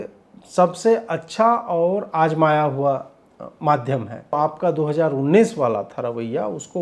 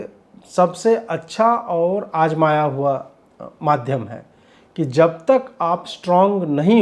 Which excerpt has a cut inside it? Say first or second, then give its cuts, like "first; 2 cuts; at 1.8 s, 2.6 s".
first; 1 cut; at 4.3 s